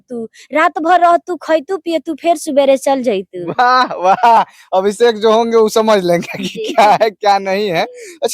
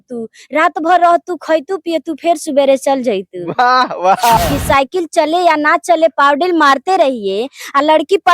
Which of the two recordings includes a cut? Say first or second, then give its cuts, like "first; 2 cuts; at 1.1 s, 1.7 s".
second; 1 cut; at 4.4 s